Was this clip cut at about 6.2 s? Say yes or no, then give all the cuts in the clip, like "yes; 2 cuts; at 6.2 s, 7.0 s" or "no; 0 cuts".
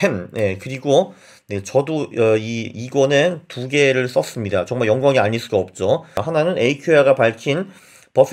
yes; 1 cut; at 6.2 s